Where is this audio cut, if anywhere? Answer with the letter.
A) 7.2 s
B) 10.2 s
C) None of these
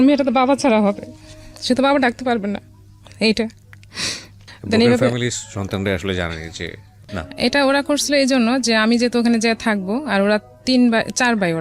A